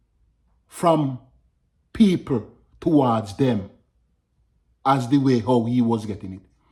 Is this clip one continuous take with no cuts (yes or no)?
yes